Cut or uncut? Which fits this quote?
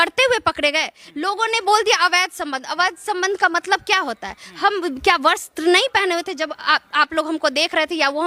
uncut